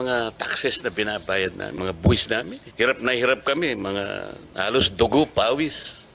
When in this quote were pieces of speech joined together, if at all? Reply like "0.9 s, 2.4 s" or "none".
1.7 s, 2.6 s